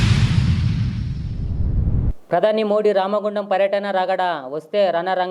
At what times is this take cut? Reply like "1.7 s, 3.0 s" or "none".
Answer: 2.0 s